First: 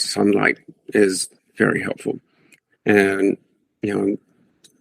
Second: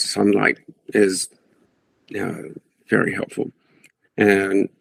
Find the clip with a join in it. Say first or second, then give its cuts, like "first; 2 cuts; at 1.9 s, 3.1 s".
first; 1 cut; at 1.4 s